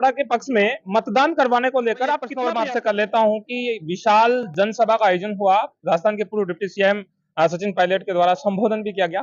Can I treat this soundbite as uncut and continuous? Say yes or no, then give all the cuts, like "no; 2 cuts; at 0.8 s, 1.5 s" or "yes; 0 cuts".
no; 1 cut; at 2.3 s